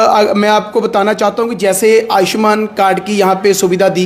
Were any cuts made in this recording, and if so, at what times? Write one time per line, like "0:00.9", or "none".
none